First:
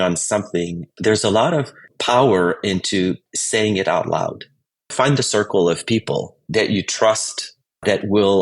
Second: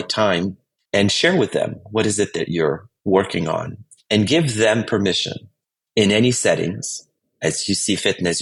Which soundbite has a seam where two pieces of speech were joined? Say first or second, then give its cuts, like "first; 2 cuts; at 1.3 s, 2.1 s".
first; 2 cuts; at 3.3 s, 4.8 s